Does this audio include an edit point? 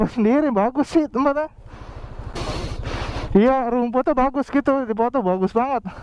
yes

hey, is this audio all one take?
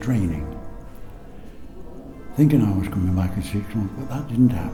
yes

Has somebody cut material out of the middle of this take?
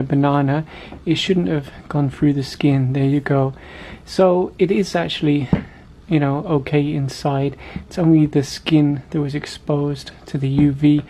no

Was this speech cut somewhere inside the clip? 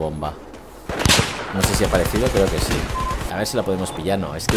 yes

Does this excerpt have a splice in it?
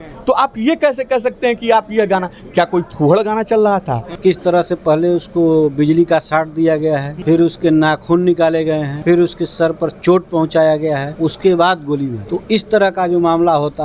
yes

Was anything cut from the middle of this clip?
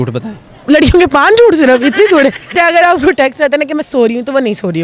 yes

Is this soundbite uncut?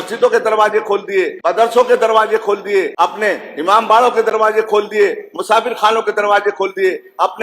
no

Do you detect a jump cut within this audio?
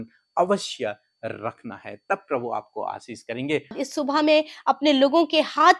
yes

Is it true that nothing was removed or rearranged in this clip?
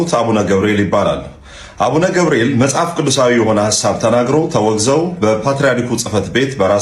yes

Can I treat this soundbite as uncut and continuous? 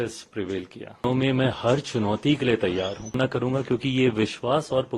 no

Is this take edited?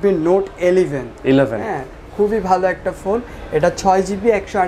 no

